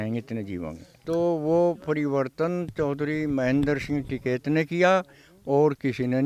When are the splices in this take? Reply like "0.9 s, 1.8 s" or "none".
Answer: 0.9 s